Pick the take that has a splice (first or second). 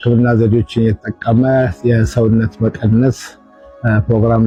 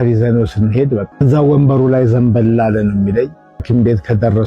second